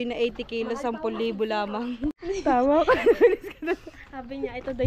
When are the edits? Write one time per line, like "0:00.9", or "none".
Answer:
0:02.2